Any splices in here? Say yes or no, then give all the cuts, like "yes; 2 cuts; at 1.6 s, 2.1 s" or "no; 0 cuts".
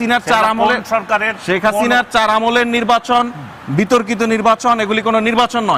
no; 0 cuts